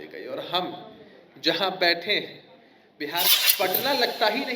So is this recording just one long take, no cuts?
no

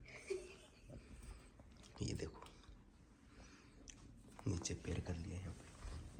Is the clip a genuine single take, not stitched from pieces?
yes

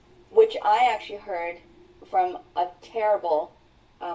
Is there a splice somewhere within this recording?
no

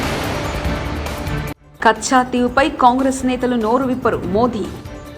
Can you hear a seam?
yes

